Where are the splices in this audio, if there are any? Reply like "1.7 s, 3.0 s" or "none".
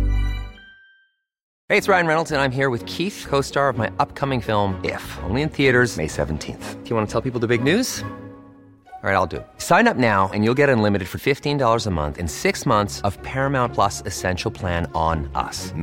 1.5 s